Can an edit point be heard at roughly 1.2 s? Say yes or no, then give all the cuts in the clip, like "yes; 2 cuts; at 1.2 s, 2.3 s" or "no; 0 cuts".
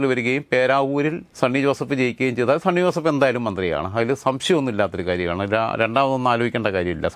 yes; 1 cut; at 1.2 s